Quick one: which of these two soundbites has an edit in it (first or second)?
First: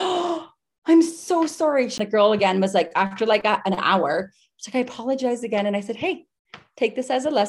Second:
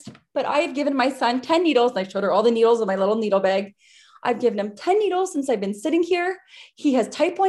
first